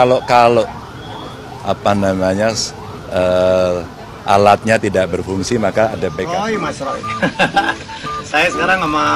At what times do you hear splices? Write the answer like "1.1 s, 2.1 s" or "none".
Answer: 6.3 s